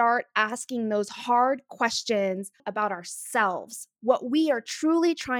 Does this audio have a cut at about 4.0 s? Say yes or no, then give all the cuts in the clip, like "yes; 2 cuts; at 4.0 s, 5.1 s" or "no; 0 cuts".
no; 1 cut; at 2.6 s